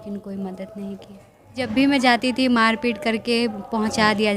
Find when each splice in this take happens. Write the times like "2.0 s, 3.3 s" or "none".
1.6 s